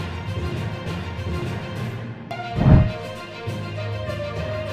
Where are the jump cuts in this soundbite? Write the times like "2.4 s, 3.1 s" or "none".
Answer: 2.2 s